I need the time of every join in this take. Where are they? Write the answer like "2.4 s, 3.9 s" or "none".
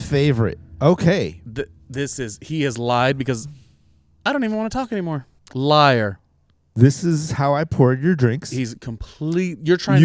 5.4 s